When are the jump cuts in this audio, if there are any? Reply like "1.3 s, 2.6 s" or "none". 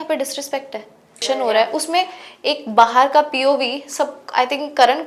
1.2 s